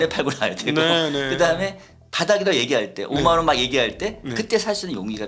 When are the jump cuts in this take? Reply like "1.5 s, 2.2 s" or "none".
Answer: none